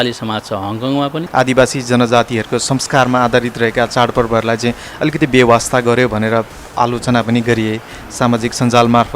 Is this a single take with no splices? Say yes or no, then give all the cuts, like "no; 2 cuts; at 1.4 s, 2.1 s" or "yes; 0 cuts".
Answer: no; 1 cut; at 1.2 s